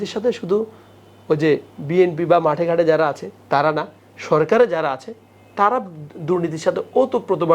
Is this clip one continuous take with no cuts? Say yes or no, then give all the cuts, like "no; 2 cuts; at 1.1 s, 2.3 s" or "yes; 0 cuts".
yes; 0 cuts